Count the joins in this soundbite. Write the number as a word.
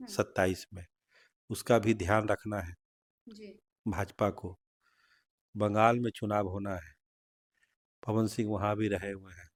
zero